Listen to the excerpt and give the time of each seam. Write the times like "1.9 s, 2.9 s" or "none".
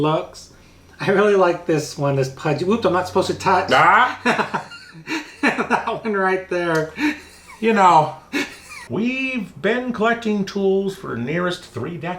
8.8 s